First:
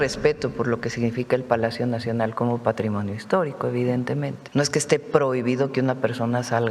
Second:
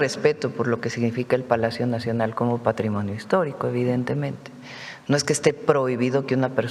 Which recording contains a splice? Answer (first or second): first